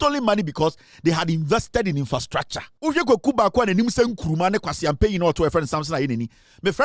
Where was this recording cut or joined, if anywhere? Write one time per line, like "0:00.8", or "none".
0:02.7